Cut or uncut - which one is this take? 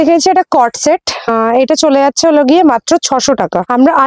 uncut